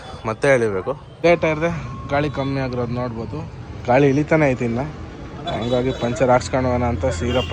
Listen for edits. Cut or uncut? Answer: cut